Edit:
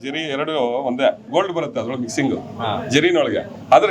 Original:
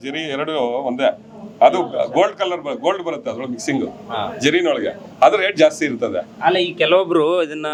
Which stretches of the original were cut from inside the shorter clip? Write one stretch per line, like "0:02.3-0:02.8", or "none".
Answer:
0:01.2-0:02.7